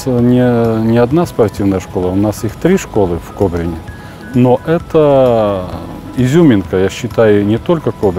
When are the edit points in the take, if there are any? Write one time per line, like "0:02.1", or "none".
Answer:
none